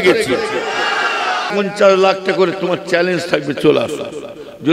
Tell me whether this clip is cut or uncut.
cut